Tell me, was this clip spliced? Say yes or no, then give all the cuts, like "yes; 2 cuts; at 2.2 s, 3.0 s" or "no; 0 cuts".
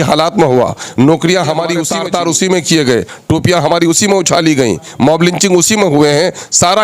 yes; 1 cut; at 1.9 s